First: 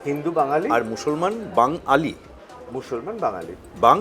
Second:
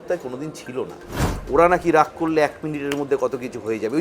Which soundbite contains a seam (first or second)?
second